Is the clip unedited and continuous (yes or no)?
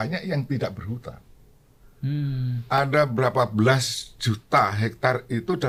yes